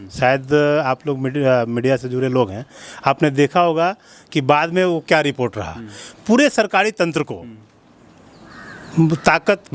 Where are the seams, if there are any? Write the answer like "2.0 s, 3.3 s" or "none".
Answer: none